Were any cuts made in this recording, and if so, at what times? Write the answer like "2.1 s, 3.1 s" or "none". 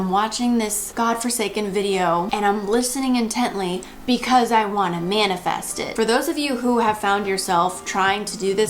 5.9 s